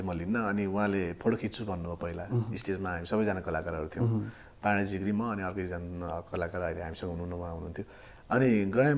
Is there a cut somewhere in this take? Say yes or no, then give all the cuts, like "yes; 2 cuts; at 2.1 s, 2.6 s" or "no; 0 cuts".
no; 0 cuts